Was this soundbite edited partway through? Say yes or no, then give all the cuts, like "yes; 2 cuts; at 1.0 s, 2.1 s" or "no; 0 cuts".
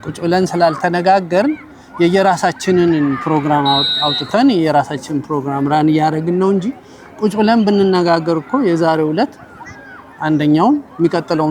no; 0 cuts